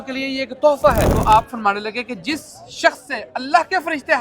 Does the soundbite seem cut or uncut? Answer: cut